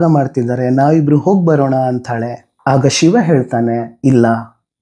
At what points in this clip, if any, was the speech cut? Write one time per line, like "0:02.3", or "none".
none